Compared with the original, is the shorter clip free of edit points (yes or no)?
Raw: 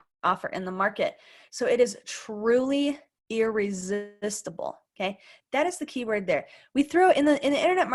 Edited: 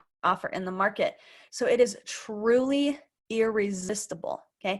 no